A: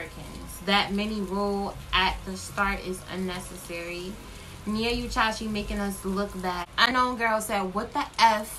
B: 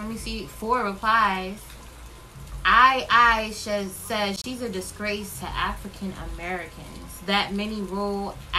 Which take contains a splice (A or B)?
A